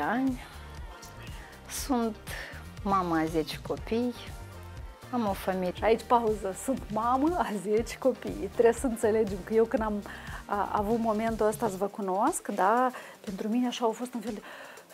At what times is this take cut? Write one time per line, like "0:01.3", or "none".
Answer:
none